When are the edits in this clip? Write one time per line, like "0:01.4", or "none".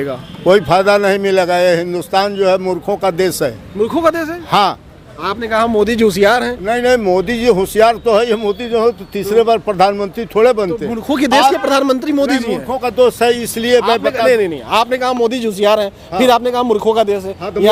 none